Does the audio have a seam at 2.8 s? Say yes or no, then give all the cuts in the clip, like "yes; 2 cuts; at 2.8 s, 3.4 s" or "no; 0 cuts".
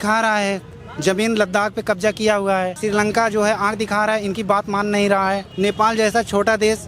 yes; 2 cuts; at 2.8 s, 5.5 s